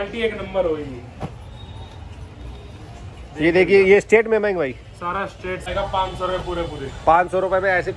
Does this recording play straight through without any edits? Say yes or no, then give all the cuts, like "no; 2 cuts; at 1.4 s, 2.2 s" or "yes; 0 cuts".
no; 1 cut; at 5.7 s